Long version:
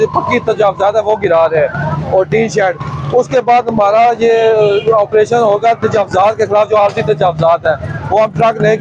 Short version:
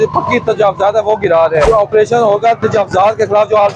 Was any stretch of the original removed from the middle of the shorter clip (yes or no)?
yes